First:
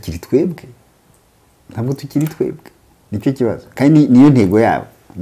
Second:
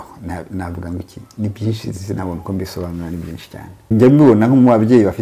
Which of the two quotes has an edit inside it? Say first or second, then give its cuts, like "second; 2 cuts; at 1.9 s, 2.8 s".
second; 1 cut; at 3.9 s